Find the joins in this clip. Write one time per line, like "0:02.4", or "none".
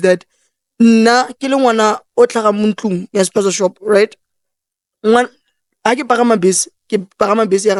none